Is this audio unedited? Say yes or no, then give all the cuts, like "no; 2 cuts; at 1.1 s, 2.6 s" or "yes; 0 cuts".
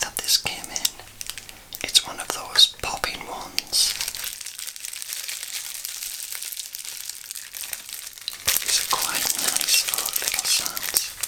yes; 0 cuts